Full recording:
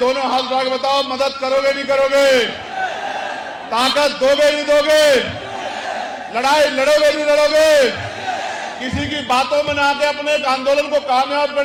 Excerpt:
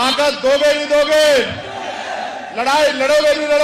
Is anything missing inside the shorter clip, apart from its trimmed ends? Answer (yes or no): no